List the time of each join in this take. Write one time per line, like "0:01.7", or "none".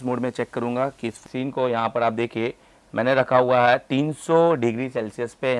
0:01.2

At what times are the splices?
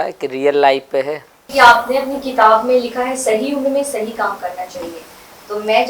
0:01.5

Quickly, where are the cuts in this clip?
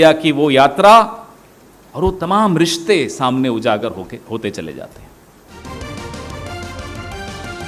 0:05.5

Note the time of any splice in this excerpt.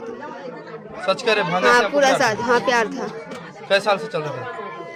none

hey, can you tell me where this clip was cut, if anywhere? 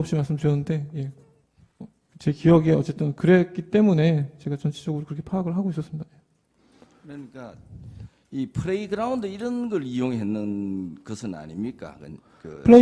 0:11.8

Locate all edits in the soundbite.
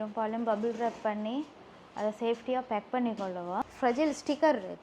0:03.7

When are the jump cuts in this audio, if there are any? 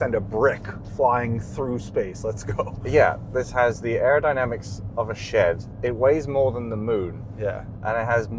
none

